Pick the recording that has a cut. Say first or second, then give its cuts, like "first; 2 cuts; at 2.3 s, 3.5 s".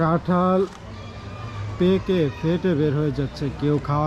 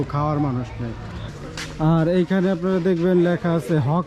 second; 1 cut; at 1.3 s